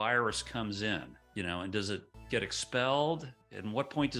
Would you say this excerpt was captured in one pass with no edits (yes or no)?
no